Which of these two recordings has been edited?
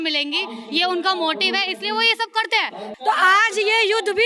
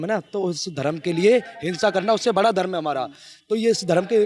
first; 1 cut; at 2.9 s

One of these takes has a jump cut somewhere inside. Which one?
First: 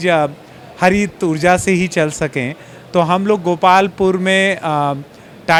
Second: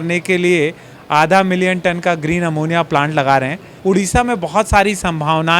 second; 1 cut; at 3.7 s

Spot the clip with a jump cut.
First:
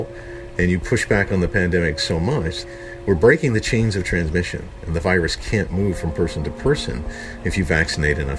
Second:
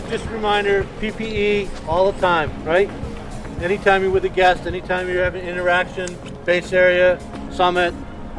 first; 1 cut; at 2.6 s

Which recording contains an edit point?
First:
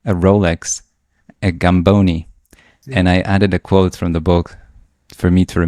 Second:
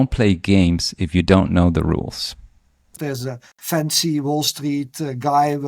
second; 1 cut; at 3.0 s

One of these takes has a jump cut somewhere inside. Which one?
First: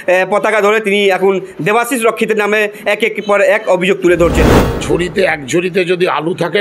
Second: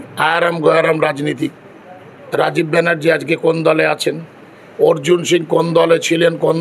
first; 1 cut; at 4.6 s

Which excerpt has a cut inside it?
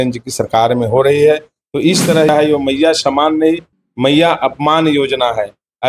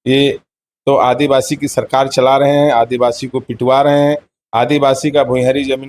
first; 1 cut; at 2.3 s

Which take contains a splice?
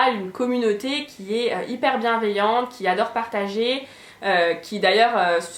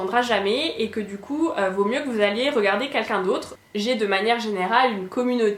second; 1 cut; at 3.5 s

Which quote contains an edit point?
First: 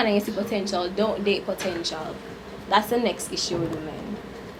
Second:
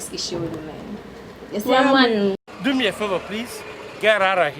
second; 1 cut; at 2.4 s

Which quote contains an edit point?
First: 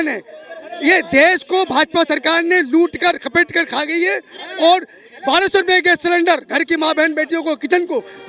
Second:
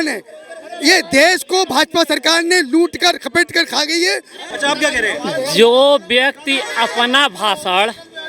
second; 1 cut; at 4.4 s

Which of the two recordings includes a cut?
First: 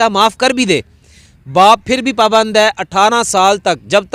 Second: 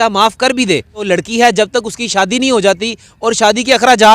second; 1 cut; at 1.1 s

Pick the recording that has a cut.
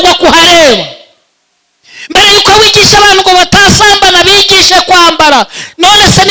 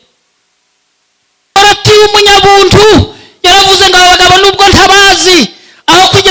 second; 1 cut; at 1.6 s

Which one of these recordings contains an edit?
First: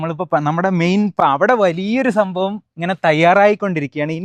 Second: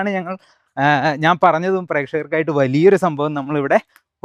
first; 1 cut; at 1.2 s

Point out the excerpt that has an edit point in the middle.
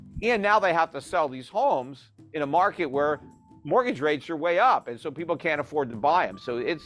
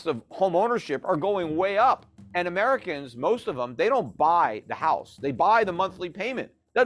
second; 1 cut; at 2.2 s

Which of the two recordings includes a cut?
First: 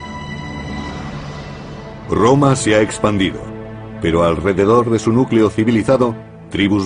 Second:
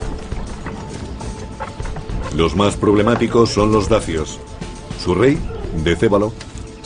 second; 1 cut; at 5.5 s

